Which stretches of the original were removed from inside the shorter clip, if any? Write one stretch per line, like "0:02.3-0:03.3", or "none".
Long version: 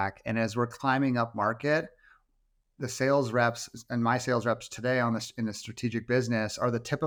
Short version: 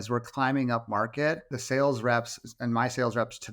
0:02.0-0:02.8